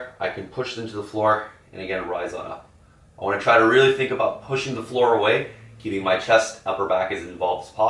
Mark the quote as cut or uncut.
uncut